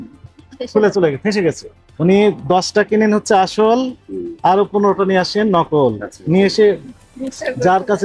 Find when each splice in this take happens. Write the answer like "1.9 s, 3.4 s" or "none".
1.7 s